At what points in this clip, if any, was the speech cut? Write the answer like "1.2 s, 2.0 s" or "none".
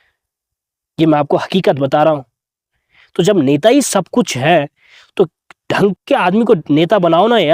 none